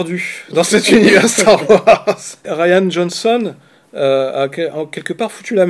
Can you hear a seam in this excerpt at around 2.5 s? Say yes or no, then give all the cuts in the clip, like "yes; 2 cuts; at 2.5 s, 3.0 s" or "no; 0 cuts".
yes; 1 cut; at 2.5 s